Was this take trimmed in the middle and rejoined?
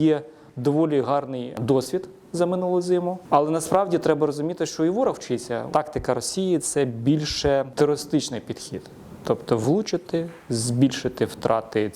yes; 4 cuts; at 1.5 s, 3.2 s, 5.7 s, 7.7 s

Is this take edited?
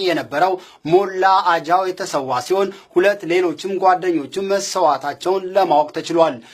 no; 0 cuts

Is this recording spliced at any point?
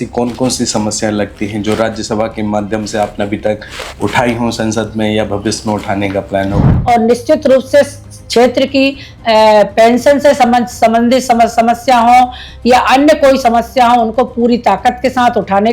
yes; 1 cut; at 6.7 s

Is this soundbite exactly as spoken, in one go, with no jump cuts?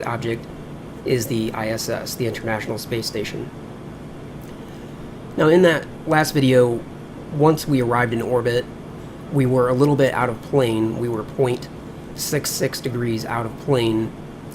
no; 1 cut; at 2.5 s

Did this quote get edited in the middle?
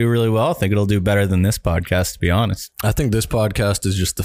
no; 0 cuts

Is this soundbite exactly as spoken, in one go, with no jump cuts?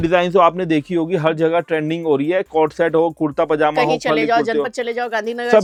yes; 0 cuts

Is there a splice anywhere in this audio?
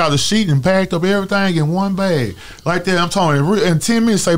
no; 0 cuts

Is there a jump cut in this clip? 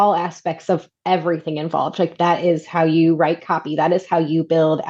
no; 0 cuts

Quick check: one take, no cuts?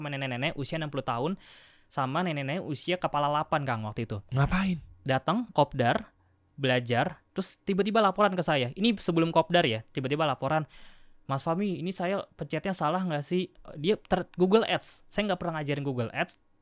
yes; 0 cuts

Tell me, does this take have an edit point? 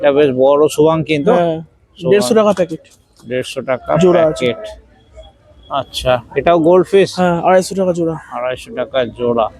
no; 0 cuts

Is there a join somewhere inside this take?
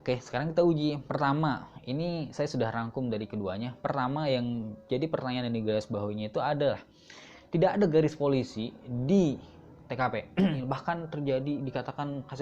yes; 1 cut; at 10.6 s

